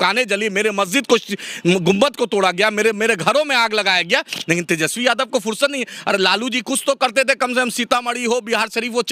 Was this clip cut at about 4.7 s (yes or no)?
no